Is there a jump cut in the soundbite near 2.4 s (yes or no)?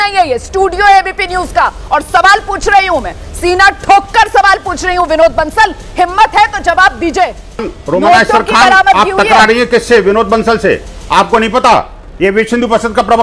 no